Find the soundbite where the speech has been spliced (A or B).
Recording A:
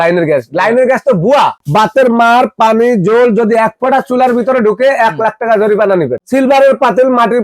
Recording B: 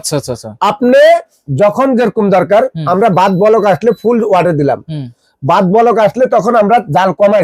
A